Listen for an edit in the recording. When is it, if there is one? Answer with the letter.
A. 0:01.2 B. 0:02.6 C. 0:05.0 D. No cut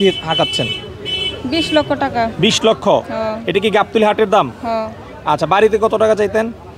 D